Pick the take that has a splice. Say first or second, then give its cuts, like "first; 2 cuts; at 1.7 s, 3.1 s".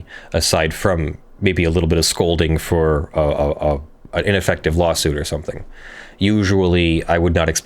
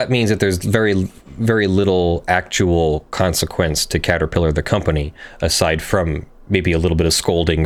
first; 1 cut; at 3.9 s